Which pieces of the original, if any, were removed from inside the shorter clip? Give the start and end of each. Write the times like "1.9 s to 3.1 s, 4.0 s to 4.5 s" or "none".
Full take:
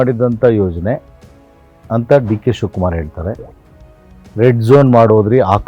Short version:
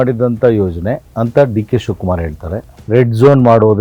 1.1 s to 1.8 s, 3.5 s to 4.2 s